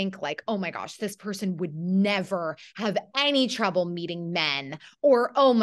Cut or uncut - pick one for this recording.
uncut